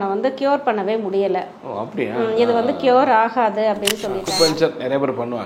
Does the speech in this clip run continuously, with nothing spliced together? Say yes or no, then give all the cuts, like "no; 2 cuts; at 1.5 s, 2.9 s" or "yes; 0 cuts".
no; 1 cut; at 4.2 s